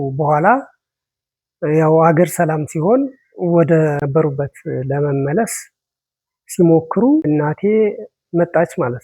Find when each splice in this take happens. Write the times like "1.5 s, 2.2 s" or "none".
4.0 s, 7.3 s